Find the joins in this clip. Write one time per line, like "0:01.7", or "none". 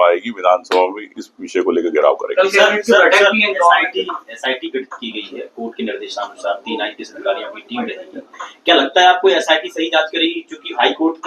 none